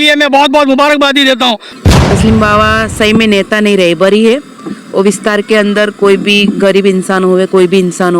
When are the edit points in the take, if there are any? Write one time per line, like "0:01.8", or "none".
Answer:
0:01.7